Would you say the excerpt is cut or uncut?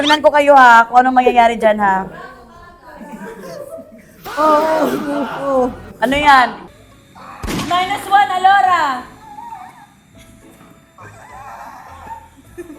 cut